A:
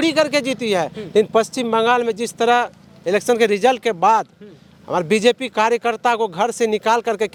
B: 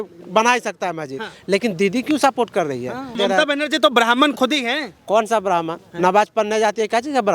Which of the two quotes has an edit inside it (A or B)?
B